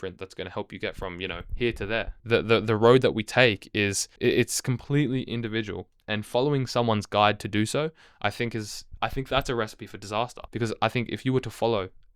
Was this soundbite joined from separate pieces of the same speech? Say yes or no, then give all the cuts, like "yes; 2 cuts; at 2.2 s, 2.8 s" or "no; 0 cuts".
yes; 4 cuts; at 1.6 s, 4.0 s, 8.8 s, 10.4 s